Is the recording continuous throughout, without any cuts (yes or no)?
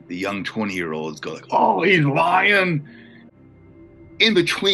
no